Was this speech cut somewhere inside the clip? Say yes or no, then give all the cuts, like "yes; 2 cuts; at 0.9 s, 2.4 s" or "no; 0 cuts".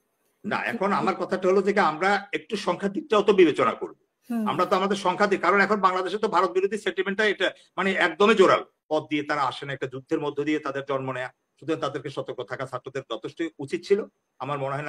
yes; 1 cut; at 8.8 s